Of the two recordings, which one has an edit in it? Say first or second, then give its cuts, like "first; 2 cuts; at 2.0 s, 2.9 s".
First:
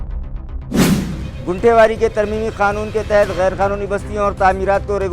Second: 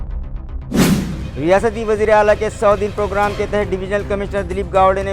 first; 1 cut; at 1.2 s